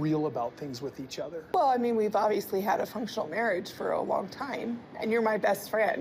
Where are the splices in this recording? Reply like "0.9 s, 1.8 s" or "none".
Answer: 1.4 s